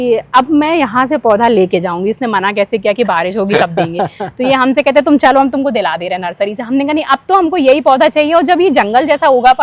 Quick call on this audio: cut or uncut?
uncut